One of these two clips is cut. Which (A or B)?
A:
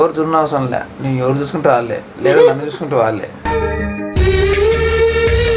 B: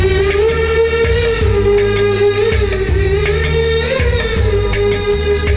A